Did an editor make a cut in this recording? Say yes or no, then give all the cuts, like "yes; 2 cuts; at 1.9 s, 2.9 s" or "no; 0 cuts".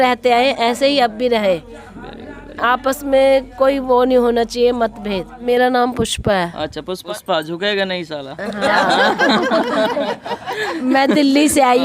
yes; 2 cuts; at 5.3 s, 7.0 s